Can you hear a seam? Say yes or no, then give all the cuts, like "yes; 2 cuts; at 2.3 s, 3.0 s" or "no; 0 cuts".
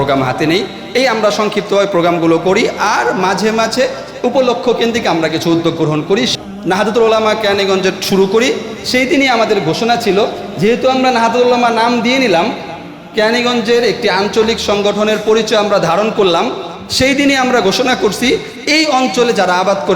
yes; 1 cut; at 6.3 s